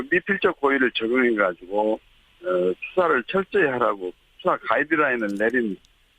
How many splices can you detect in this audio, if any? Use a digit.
1